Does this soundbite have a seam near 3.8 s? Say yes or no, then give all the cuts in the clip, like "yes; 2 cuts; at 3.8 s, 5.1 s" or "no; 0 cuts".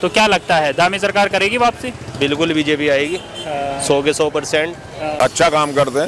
no; 1 cut; at 5.1 s